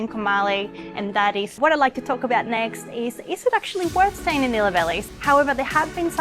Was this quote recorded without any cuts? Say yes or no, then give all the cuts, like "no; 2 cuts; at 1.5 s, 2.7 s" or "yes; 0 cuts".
no; 2 cuts; at 1.5 s, 5.0 s